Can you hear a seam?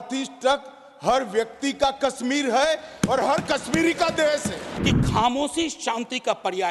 yes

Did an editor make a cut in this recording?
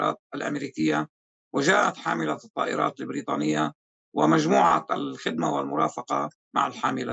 no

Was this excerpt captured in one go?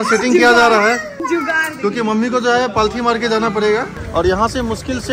no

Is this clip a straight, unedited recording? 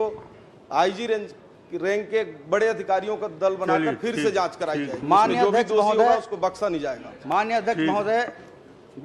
yes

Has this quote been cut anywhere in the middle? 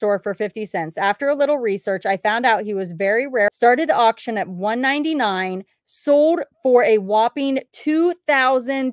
yes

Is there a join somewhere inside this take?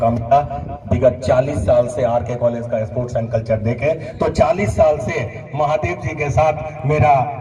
no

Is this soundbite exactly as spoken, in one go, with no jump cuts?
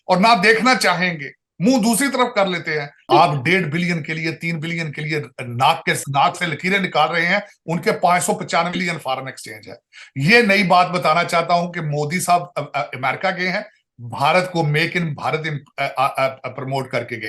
no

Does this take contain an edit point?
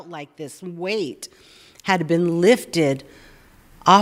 no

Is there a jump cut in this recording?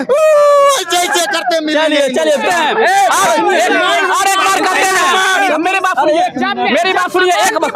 yes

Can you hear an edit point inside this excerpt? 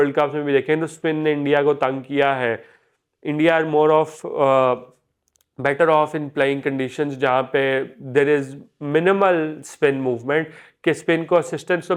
no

